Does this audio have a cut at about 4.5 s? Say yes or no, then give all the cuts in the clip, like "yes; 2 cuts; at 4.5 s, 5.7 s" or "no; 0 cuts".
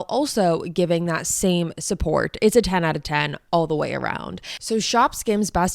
yes; 1 cut; at 4.5 s